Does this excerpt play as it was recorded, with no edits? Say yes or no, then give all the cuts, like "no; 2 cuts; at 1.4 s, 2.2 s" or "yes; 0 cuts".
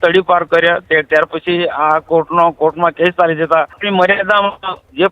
no; 1 cut; at 3.8 s